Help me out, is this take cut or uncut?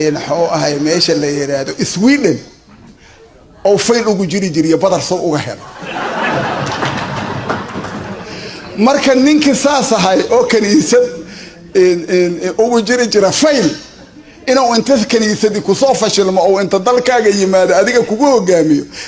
uncut